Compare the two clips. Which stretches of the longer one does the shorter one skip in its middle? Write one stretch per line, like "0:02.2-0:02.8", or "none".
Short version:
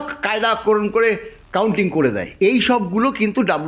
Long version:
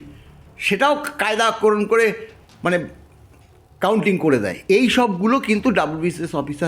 0:02.3-0:03.6